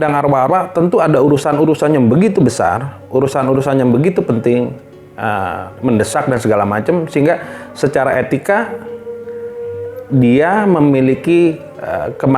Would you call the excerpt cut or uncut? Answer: uncut